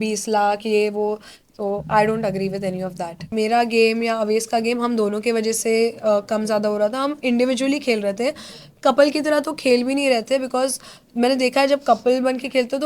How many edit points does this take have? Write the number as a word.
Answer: one